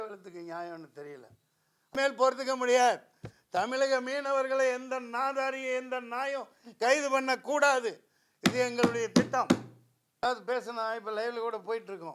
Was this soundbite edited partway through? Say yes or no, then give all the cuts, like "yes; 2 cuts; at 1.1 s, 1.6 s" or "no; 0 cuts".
yes; 2 cuts; at 2.0 s, 10.2 s